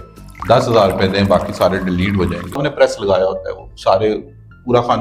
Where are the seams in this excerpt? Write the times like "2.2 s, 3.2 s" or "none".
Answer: 2.7 s